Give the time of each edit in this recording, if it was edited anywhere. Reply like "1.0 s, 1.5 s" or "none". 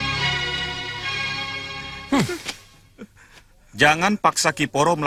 none